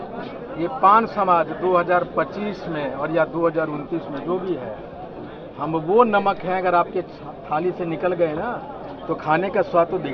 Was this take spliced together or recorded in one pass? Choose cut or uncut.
uncut